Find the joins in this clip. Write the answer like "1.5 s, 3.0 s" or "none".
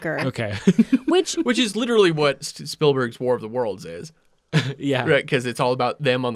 2.6 s